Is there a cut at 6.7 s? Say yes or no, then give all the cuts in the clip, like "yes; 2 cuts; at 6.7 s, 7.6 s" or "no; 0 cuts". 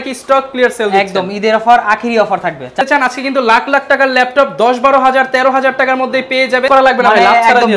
yes; 2 cuts; at 2.8 s, 6.7 s